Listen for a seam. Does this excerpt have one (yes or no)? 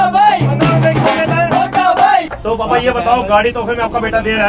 yes